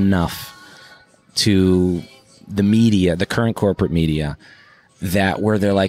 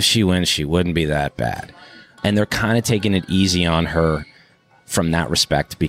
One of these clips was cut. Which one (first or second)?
second